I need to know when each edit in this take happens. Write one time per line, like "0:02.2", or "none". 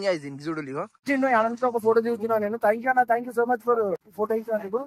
0:01.1
0:04.1